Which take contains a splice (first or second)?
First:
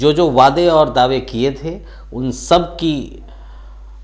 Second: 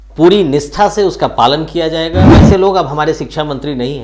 second